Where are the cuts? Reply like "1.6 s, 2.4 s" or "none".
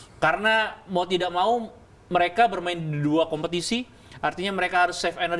none